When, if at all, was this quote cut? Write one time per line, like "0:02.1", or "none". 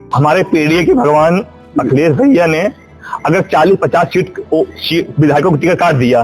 none